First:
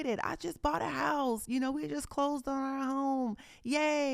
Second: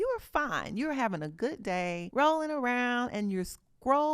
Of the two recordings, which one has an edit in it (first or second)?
second